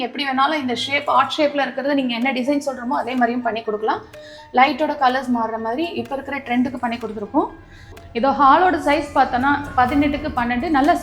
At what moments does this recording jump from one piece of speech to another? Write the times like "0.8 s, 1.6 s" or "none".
8.0 s

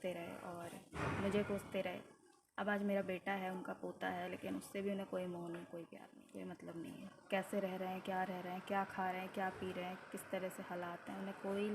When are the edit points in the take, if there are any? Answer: 6.1 s

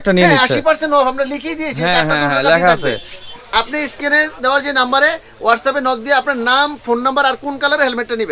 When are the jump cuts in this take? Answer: 3.2 s

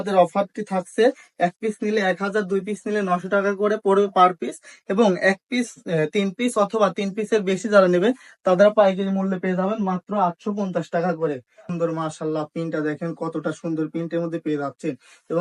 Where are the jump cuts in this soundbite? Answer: 11.6 s

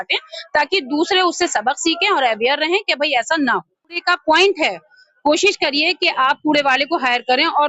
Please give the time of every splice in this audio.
4.0 s

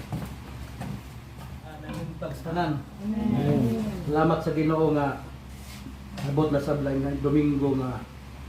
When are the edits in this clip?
1.8 s

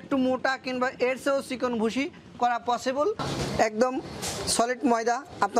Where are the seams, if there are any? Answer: 3.3 s

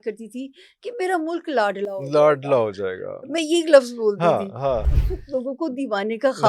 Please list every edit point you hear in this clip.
4.8 s

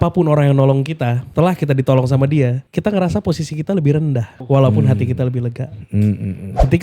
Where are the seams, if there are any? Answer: 1.2 s, 2.7 s

